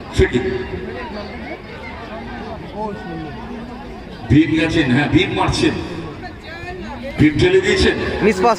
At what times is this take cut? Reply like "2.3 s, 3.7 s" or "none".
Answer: none

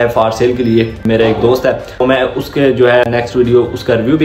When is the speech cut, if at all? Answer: 1.0 s, 2.0 s, 3.1 s

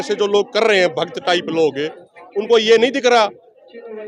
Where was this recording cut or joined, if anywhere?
none

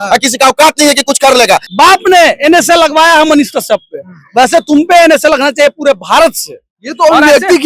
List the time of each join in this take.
1.7 s

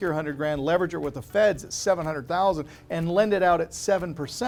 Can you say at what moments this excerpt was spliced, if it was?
none

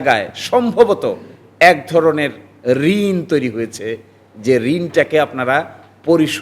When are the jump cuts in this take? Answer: none

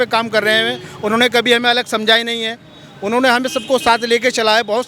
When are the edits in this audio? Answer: none

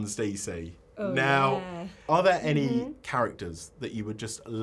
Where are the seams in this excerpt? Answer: 2.1 s

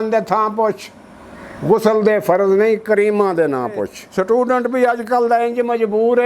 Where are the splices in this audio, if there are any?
4.0 s

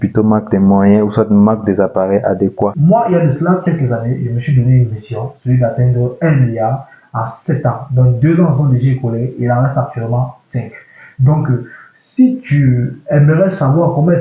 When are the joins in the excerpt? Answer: 2.7 s

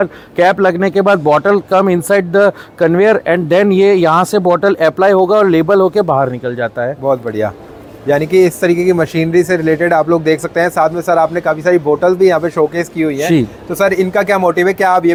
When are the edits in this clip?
none

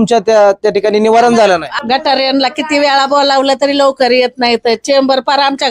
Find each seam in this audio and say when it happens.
1.7 s

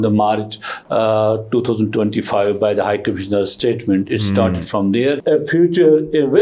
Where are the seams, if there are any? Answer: 5.2 s

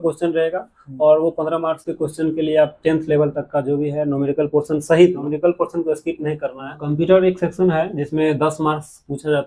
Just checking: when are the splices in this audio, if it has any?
5.2 s, 6.9 s

